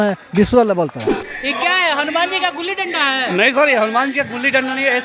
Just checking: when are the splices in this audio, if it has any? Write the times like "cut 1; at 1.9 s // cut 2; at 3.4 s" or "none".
cut 1; at 1.1 s